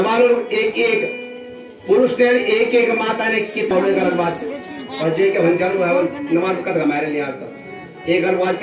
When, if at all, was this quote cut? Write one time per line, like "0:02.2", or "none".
none